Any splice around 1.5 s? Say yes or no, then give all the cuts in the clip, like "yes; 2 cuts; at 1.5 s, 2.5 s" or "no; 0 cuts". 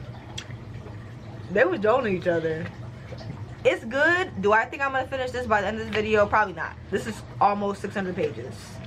no; 2 cuts; at 3.5 s, 6.8 s